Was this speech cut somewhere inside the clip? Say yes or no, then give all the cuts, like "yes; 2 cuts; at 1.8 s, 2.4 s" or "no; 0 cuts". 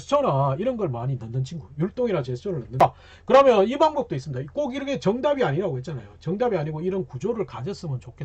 yes; 1 cut; at 2.8 s